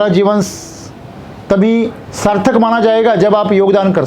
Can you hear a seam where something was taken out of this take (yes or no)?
yes